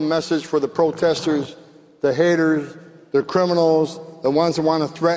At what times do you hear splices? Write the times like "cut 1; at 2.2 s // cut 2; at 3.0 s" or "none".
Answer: none